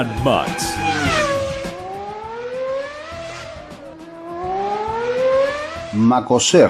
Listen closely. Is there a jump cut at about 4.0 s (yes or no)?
no